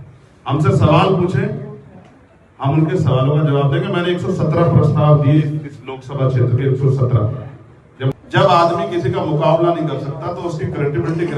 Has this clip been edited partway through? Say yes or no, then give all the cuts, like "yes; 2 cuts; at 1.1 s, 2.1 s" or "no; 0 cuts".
yes; 1 cut; at 7.7 s